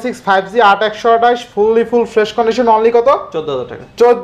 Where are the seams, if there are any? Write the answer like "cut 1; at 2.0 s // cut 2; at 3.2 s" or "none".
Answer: none